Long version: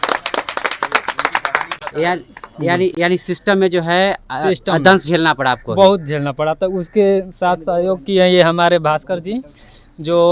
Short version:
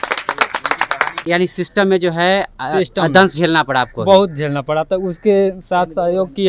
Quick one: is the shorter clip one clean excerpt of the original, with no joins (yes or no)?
no